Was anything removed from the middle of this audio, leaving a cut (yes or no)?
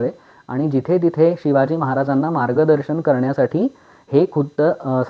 no